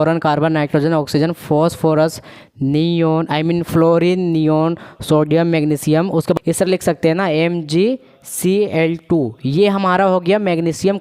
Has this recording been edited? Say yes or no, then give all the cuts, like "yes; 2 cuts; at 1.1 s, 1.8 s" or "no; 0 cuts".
yes; 1 cut; at 6.4 s